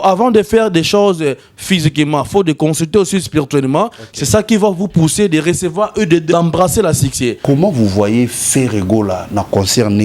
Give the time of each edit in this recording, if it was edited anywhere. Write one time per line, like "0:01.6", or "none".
0:06.3
0:07.4